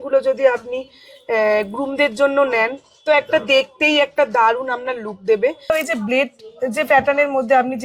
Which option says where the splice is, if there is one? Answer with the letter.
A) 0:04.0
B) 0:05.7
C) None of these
B